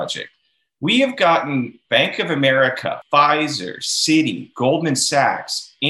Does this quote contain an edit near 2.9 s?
yes; 2 cuts; at 1.8 s, 2.9 s

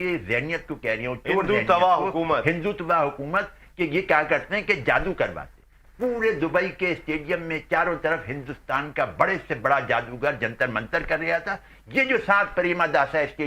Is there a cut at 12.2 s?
no; 0 cuts

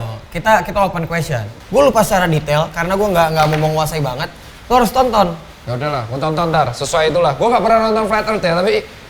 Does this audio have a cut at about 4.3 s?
no; 1 cut; at 1.5 s

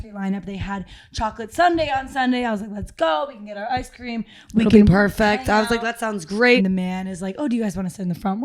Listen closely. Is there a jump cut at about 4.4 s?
no; 1 cut; at 6.6 s

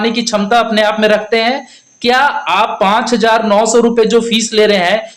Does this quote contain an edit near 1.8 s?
no; 0 cuts

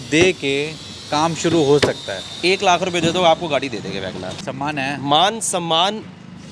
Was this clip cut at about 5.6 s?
no; 1 cut; at 4.3 s

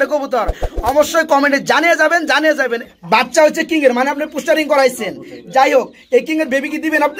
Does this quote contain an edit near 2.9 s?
yes; 1 cut; at 2.9 s

